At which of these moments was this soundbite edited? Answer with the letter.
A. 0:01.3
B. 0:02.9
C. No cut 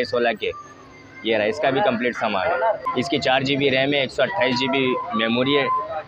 B